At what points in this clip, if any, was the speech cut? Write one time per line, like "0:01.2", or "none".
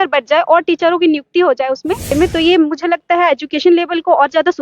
0:02.2